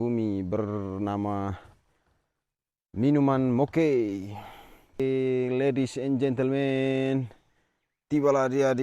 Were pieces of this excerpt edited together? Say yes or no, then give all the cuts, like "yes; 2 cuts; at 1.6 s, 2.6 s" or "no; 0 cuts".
yes; 1 cut; at 5.0 s